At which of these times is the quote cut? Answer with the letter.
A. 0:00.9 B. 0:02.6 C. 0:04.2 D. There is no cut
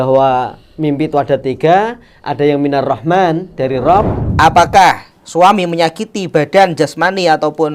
C